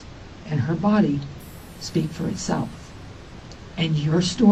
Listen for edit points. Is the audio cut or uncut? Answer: uncut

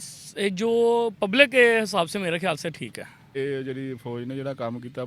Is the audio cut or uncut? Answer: cut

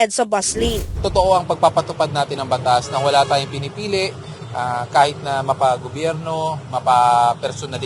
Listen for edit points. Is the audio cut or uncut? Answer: cut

